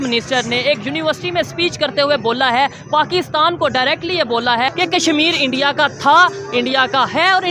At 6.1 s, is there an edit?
no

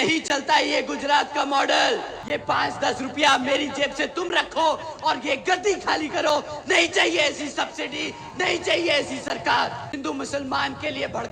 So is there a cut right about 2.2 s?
yes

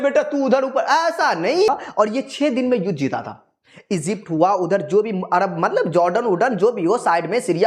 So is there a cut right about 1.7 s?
yes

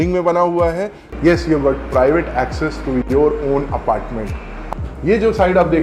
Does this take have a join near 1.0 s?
yes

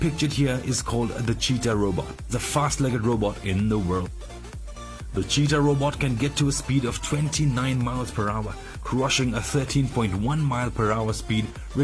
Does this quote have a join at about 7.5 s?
yes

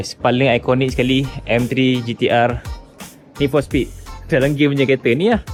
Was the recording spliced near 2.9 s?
no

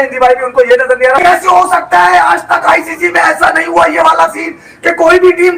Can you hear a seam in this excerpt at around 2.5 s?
no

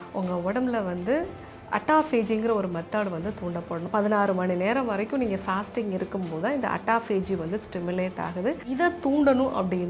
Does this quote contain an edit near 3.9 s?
yes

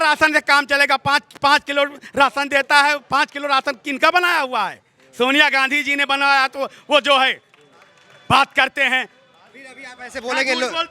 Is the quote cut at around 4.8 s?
no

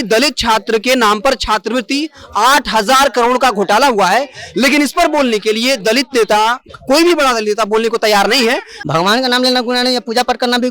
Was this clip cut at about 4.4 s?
no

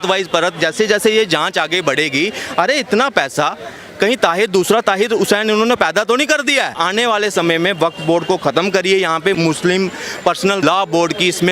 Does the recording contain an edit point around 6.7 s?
yes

